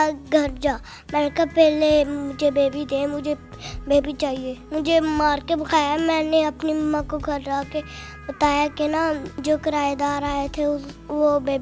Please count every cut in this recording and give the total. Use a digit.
2